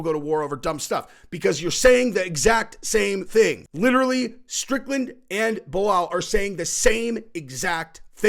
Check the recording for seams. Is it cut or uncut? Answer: cut